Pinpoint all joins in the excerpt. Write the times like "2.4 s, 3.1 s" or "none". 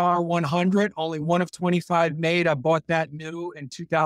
none